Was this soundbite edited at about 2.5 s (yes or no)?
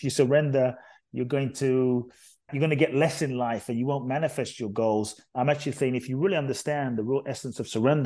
yes